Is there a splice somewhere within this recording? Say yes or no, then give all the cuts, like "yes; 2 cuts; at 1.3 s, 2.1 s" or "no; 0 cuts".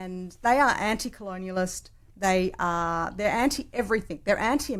no; 0 cuts